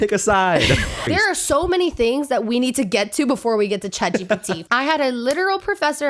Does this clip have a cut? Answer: yes; 2 cuts; at 1.1 s, 4.6 s

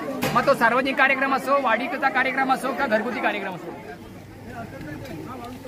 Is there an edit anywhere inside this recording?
yes; 1 cut; at 3.7 s

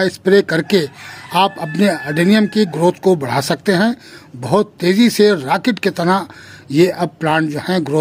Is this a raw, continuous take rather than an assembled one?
yes; 0 cuts

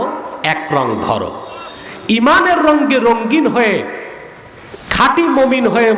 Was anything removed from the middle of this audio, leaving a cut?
no; 0 cuts

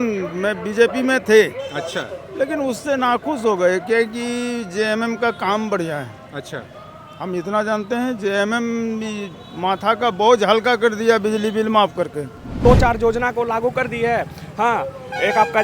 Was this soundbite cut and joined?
yes; 1 cut; at 12.5 s

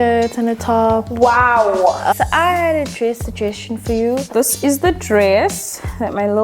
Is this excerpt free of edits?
no; 2 cuts; at 2.1 s, 4.3 s

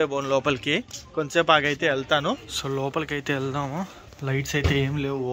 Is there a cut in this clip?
no; 0 cuts

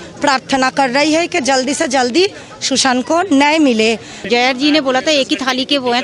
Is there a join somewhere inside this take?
yes; 1 cut; at 4.2 s

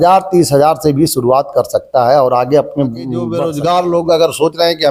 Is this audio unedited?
no; 1 cut; at 3.3 s

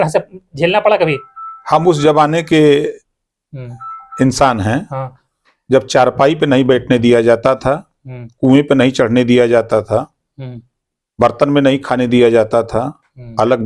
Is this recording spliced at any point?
no; 0 cuts

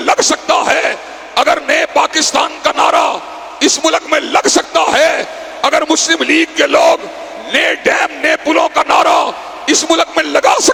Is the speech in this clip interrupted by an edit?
no; 0 cuts

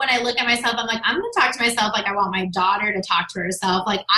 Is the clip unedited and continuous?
yes; 0 cuts

